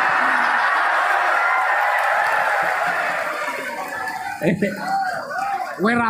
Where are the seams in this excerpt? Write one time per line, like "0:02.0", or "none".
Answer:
none